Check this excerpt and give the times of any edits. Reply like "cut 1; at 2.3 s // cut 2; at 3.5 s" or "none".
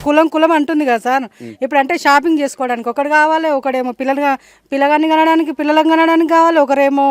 none